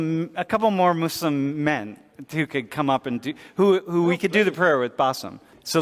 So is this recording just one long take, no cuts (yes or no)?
yes